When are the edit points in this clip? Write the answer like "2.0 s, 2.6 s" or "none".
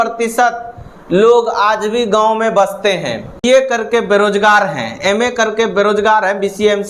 3.4 s